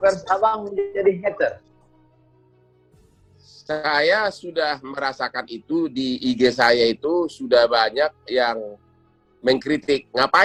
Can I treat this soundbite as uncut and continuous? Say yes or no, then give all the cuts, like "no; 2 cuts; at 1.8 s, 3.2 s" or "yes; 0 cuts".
yes; 0 cuts